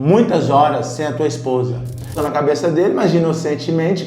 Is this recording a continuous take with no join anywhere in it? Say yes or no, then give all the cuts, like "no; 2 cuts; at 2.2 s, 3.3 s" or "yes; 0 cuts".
no; 1 cut; at 2.2 s